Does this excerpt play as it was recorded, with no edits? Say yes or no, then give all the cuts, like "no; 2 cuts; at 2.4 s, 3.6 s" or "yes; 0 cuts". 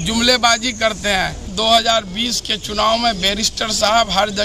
no; 1 cut; at 1.5 s